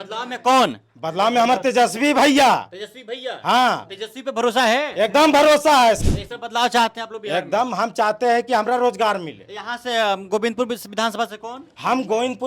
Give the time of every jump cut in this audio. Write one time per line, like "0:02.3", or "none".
0:06.0